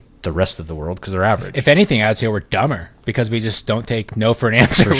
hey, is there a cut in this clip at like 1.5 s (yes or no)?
yes